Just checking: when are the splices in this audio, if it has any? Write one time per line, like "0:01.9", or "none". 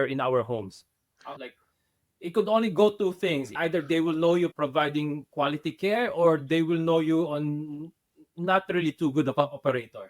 0:01.3
0:03.5
0:04.5